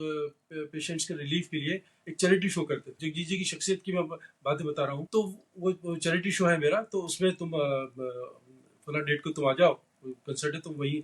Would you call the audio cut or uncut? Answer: cut